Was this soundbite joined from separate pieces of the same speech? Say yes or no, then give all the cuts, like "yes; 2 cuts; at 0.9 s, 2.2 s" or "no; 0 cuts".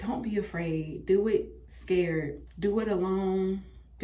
yes; 1 cut; at 2.4 s